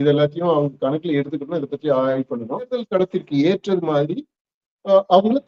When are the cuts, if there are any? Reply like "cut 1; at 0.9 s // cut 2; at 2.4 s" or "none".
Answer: cut 1; at 2.9 s